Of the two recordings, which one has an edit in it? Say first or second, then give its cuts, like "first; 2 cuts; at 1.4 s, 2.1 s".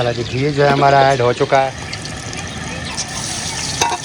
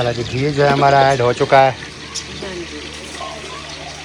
first; 1 cut; at 1.7 s